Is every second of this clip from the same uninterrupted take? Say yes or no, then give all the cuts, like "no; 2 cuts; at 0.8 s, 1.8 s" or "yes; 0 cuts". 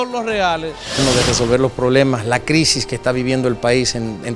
no; 1 cut; at 1.0 s